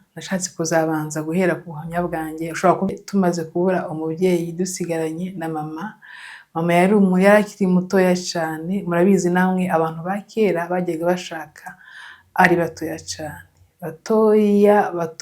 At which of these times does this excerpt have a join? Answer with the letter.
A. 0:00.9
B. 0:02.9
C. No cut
B